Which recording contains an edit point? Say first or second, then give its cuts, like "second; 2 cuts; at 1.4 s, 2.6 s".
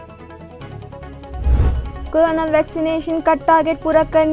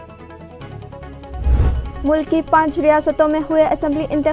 second; 1 cut; at 1.6 s